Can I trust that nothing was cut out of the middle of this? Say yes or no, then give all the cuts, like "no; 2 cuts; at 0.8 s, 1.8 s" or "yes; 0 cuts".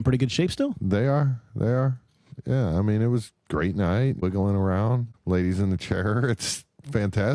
no; 2 cuts; at 4.2 s, 5.1 s